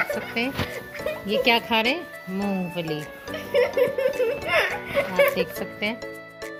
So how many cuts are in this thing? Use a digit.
0